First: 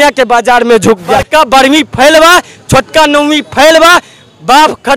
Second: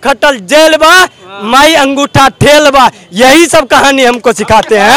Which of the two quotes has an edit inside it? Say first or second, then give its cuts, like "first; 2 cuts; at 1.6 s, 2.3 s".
first; 1 cut; at 1.3 s